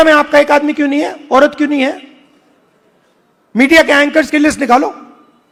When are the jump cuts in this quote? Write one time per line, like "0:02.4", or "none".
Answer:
none